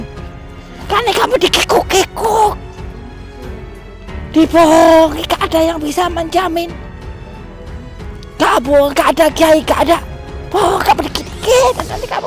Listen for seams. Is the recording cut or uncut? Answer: cut